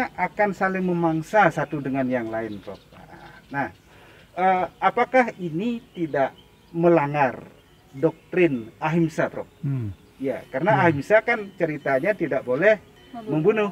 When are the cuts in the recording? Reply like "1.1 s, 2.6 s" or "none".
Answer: none